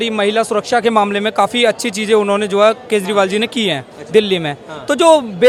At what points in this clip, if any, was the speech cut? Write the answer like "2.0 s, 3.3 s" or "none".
none

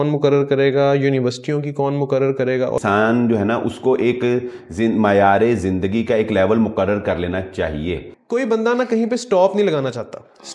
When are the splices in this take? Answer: 2.8 s, 8.1 s

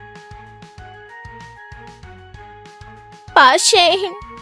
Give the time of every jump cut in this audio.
3.3 s

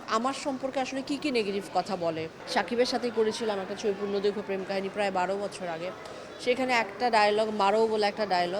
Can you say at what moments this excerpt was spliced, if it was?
2.4 s

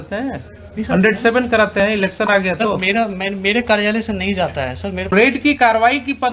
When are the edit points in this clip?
5.1 s

